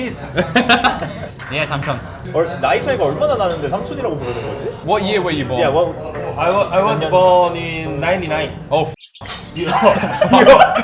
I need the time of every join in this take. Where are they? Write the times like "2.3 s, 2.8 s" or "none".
none